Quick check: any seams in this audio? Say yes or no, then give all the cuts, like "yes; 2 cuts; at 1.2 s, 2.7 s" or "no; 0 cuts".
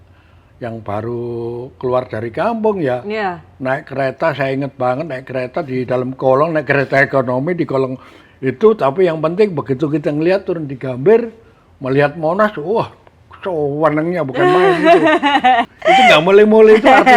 yes; 1 cut; at 15.6 s